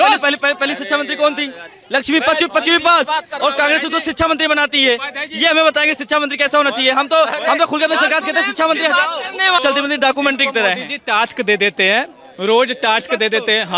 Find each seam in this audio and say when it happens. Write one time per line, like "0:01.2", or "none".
0:09.6